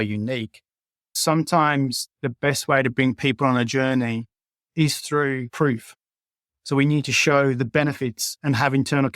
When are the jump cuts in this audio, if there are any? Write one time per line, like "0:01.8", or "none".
0:01.2
0:05.5